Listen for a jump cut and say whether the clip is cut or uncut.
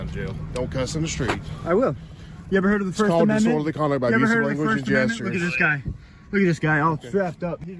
uncut